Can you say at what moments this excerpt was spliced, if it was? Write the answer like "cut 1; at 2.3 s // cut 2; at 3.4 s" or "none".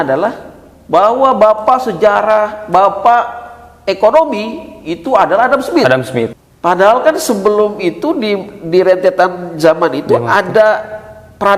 cut 1; at 6.3 s